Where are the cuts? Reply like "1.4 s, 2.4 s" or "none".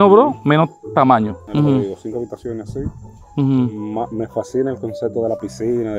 none